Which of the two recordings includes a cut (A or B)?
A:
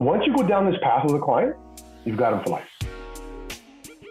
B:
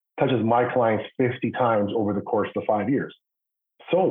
A